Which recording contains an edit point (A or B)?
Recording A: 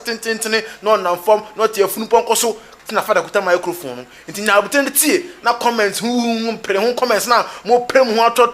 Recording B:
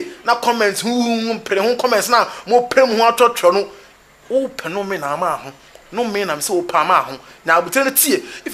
A